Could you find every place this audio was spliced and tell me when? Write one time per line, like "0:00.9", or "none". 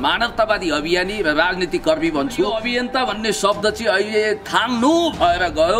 0:02.6